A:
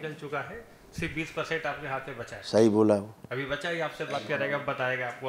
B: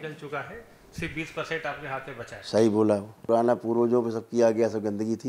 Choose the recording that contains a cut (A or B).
B